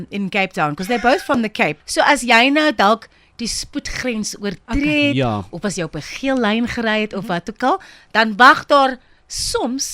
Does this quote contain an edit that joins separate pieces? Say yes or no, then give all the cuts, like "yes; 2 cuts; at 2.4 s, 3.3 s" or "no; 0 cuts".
yes; 1 cut; at 1.8 s